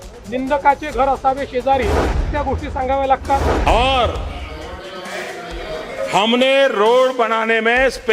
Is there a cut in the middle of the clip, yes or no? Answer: yes